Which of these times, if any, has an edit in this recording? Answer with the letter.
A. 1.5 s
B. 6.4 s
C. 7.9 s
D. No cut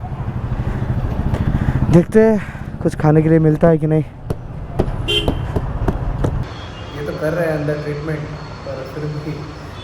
B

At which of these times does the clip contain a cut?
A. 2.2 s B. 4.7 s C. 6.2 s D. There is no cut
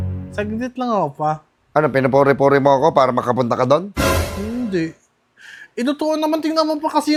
D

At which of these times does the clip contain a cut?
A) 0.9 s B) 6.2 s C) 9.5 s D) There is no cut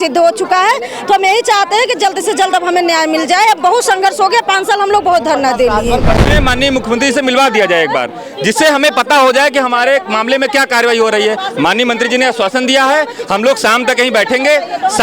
B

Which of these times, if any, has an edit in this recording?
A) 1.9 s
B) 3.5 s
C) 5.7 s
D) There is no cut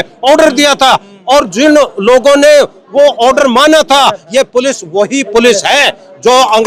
D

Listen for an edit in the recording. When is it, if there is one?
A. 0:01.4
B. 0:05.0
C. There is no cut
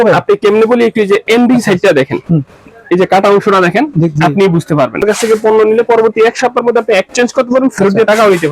B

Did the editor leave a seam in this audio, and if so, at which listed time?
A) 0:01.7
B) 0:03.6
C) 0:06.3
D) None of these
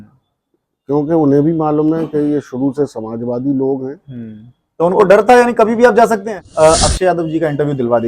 C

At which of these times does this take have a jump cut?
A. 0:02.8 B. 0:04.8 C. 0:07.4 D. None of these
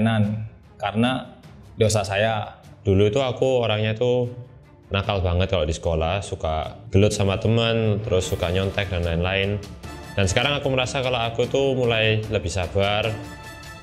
A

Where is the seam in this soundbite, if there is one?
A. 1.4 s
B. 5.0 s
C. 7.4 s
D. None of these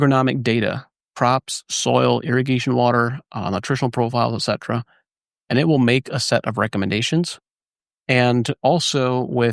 D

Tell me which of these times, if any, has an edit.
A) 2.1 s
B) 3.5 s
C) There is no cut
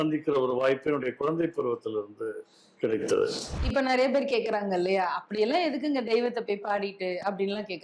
B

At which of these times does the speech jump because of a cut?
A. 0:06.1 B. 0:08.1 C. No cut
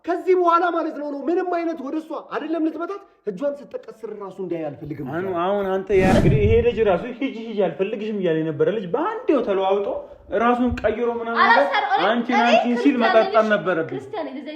A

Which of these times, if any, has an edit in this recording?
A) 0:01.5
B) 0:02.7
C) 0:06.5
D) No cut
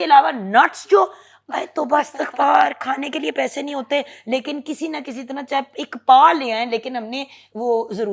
D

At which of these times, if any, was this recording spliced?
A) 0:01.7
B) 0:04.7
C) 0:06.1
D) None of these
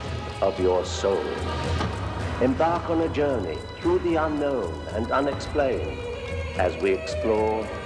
A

